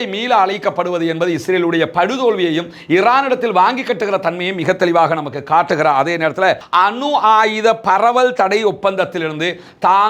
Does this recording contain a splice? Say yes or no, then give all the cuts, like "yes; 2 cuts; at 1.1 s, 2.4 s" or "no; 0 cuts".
yes; 1 cut; at 6.6 s